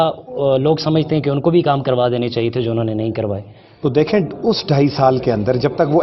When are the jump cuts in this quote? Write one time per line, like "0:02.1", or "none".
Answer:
0:03.6